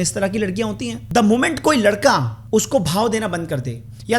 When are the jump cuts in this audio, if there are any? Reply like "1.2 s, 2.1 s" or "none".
1.0 s, 2.4 s